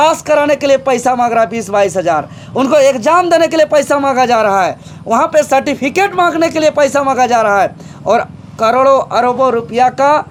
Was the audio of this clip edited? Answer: no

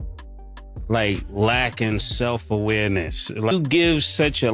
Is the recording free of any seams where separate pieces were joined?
no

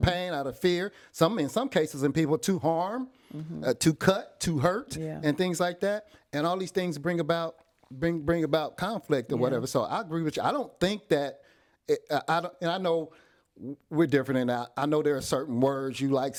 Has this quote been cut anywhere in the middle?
no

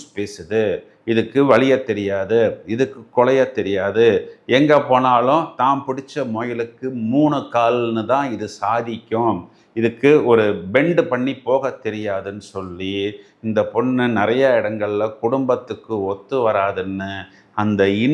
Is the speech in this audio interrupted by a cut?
no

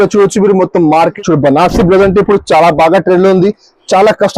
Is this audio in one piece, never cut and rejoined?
no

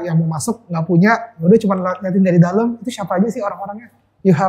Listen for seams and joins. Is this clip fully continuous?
yes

